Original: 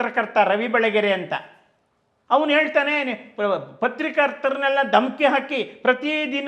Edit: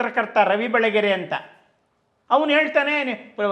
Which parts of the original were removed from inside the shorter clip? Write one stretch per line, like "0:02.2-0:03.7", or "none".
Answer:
none